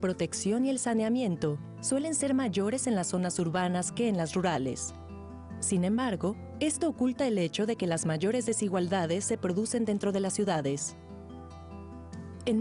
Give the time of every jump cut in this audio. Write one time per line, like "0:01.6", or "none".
0:09.2